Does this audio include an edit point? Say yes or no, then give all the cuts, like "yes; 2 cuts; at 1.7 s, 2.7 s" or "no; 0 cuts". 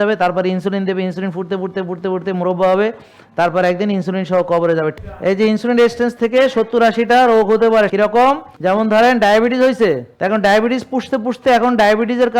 yes; 3 cuts; at 4.9 s, 8.1 s, 10.1 s